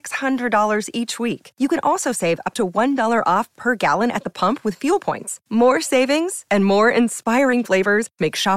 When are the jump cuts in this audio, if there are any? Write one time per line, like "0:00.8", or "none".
none